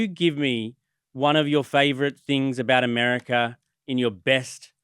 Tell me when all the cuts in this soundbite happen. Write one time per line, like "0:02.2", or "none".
none

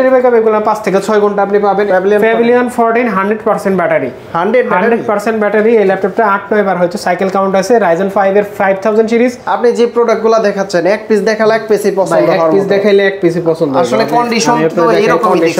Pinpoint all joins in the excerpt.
0:01.9
0:09.4

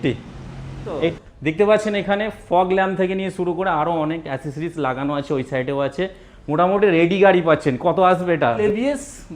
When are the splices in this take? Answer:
0:01.2
0:08.6

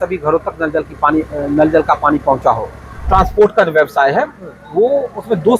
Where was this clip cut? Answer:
0:03.0

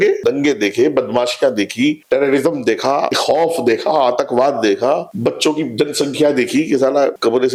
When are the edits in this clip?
none

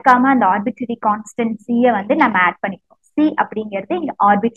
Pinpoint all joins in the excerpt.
none

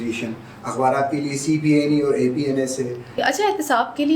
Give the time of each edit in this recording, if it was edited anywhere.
0:03.2

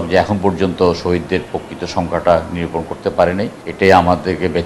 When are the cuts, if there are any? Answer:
0:03.6

